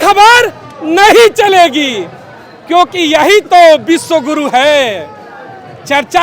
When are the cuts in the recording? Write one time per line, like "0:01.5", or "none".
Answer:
none